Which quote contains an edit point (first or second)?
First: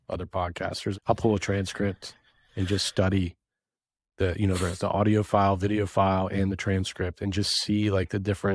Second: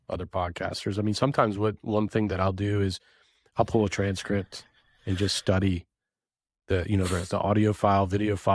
first